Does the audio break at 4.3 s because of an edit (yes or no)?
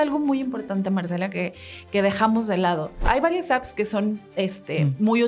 no